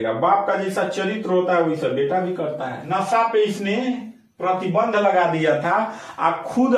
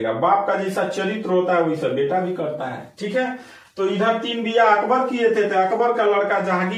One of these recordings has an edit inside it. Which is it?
first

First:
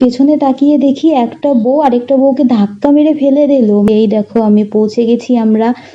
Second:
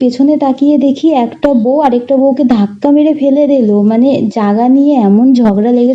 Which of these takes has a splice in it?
first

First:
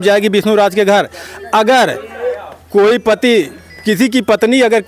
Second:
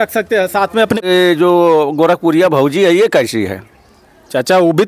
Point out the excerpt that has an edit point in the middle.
second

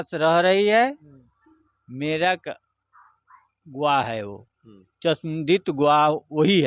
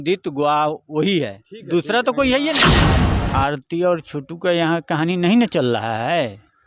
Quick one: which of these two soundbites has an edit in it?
second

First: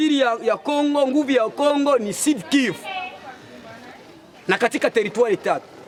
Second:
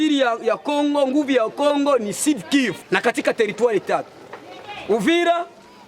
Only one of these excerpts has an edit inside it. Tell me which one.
second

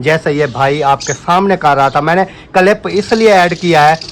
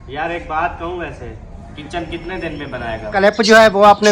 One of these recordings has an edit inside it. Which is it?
second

